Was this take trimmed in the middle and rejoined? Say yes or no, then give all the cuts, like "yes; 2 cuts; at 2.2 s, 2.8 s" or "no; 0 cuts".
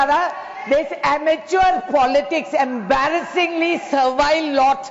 no; 0 cuts